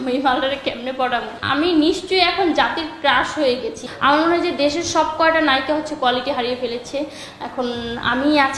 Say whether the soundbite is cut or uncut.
cut